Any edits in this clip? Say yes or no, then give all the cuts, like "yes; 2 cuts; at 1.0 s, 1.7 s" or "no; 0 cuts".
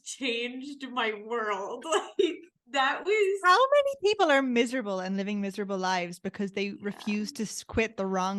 no; 0 cuts